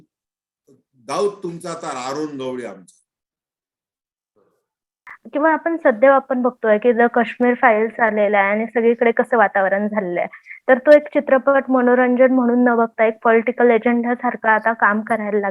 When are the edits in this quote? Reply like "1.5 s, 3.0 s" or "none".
5.0 s